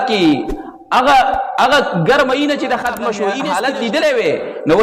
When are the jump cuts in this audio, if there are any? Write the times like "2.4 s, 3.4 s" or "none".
3.3 s